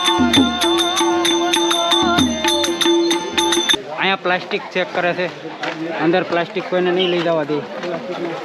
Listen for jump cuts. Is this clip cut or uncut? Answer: uncut